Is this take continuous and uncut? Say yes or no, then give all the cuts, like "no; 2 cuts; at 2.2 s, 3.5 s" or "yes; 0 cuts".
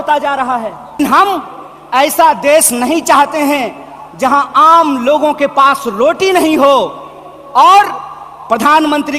no; 1 cut; at 1.0 s